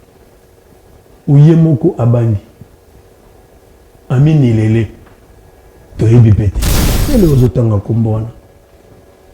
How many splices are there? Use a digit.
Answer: 1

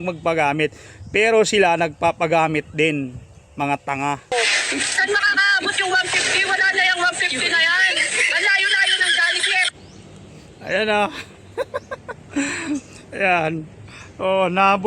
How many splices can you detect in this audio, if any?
1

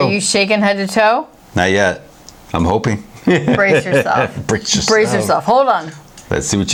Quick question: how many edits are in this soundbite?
0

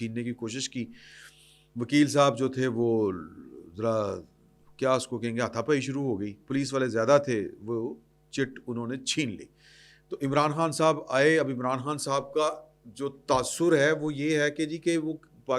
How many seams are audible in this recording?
0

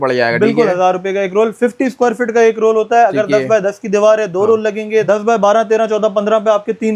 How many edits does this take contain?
1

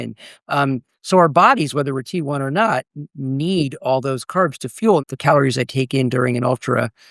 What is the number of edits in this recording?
1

